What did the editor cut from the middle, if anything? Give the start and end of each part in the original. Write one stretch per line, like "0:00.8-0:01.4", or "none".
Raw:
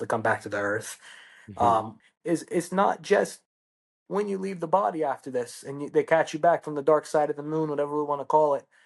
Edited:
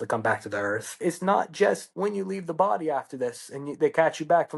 0:01.0-0:02.5
0:03.4-0:04.0